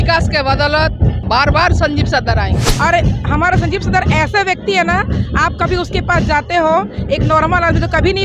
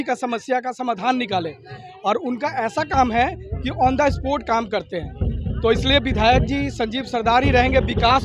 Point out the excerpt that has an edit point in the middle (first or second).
first